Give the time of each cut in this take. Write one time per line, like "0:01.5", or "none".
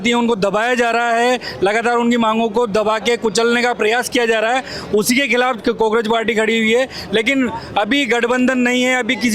none

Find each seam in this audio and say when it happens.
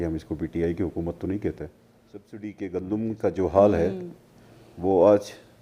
0:02.4

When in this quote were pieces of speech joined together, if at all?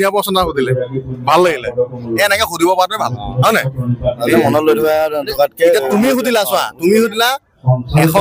none

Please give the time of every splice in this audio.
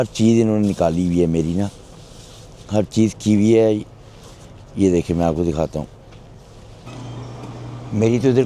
0:06.9

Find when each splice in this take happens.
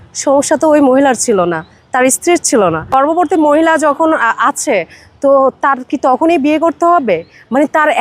0:02.9

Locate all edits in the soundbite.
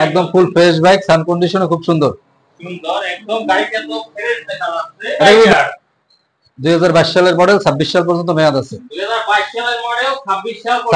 0:05.5

